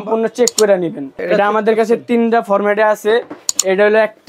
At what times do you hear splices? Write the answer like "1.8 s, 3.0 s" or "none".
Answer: 1.2 s